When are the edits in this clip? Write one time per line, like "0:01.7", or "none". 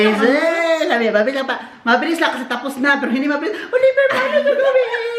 none

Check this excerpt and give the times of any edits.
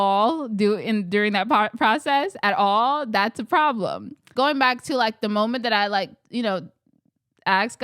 0:04.3

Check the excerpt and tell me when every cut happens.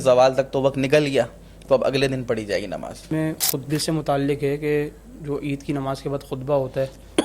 0:03.1

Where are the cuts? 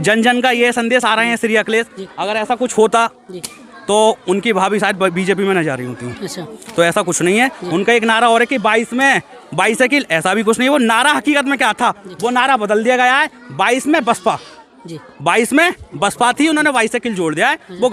none

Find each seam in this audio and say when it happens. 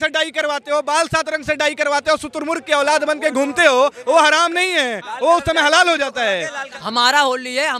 0:06.6

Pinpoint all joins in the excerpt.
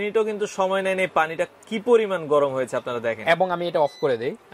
none

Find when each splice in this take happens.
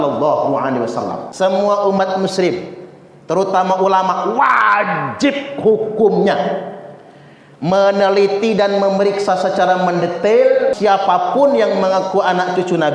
0:01.2
0:10.8

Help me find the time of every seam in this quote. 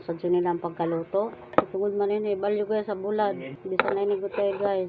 0:01.4
0:03.5

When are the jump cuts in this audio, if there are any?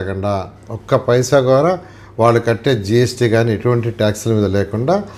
none

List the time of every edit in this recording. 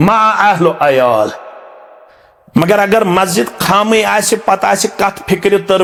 none

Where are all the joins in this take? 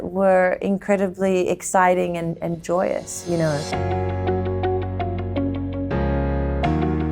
0:03.6

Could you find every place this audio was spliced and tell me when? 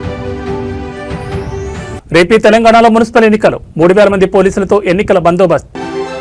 0:00.8
0:01.5

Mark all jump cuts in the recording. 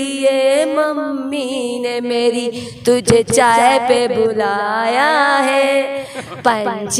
none

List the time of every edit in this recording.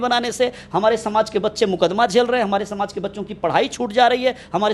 none

